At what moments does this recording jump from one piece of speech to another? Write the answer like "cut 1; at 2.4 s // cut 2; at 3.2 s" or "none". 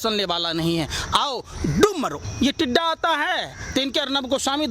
cut 1; at 2.2 s